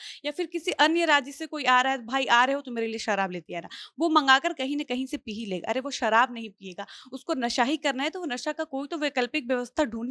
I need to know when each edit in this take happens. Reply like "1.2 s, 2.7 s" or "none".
none